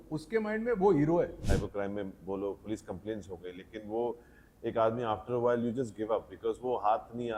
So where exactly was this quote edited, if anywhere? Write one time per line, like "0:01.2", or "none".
0:01.4